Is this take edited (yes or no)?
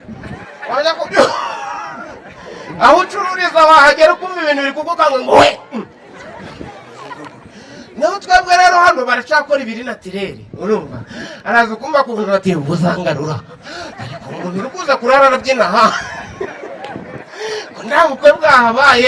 no